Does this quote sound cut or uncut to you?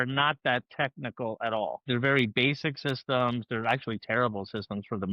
cut